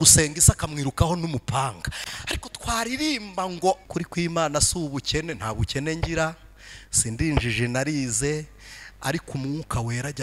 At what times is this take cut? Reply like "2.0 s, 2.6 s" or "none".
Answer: 3.9 s